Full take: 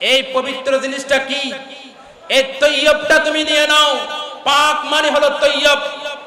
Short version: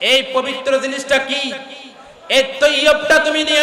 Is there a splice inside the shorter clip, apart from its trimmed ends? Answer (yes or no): no